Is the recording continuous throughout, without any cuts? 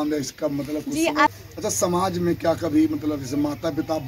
no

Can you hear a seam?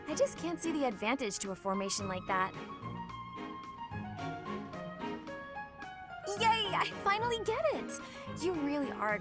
yes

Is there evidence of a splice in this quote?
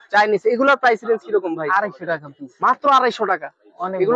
no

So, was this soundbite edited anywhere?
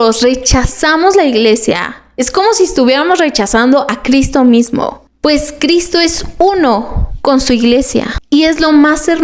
no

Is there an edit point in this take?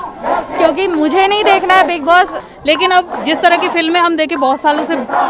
yes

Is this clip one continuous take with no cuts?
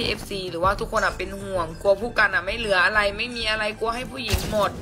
yes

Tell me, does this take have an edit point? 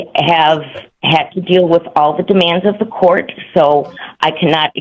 no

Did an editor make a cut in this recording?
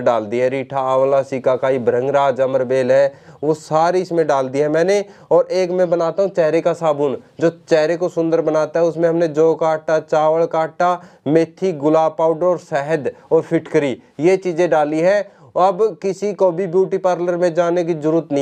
no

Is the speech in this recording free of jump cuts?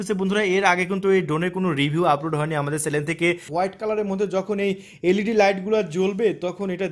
no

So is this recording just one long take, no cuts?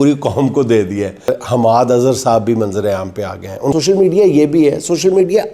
no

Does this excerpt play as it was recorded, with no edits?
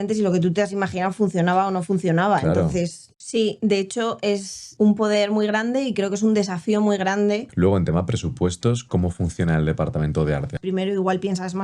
no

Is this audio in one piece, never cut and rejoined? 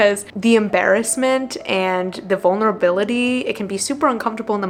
yes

